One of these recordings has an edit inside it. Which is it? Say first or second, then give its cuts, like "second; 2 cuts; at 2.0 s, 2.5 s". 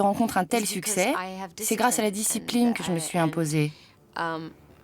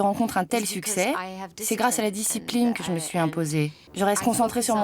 second; 1 cut; at 3.8 s